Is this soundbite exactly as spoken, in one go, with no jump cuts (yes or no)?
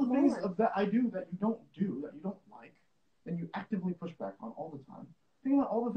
yes